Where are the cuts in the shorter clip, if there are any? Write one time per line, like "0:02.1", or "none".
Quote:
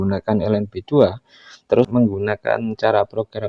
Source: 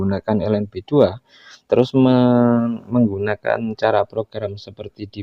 0:01.9